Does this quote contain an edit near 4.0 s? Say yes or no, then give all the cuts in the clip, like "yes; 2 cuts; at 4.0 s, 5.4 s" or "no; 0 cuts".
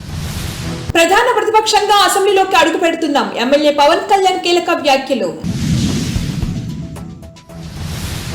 no; 1 cut; at 0.9 s